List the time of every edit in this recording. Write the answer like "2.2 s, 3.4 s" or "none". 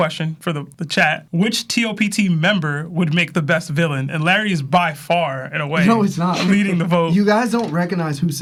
none